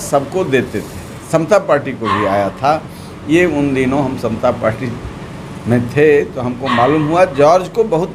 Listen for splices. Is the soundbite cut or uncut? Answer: uncut